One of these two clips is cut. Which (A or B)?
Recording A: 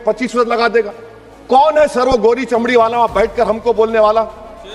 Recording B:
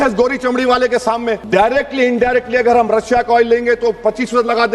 B